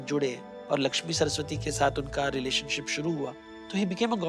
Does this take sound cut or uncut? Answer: uncut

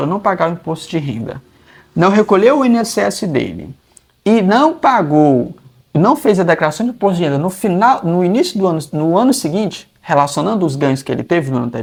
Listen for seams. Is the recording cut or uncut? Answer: uncut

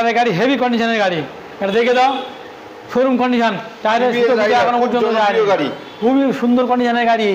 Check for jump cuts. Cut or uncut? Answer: cut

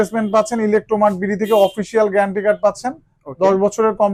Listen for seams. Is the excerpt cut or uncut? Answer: uncut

